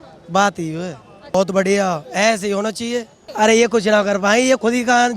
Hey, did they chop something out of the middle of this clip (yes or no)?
yes